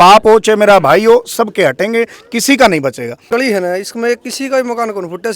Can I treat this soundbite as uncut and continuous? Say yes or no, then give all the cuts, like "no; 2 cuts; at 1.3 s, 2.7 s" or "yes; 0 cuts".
no; 1 cut; at 3.2 s